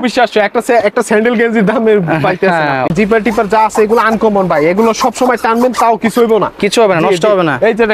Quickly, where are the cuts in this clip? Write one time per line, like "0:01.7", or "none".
0:02.9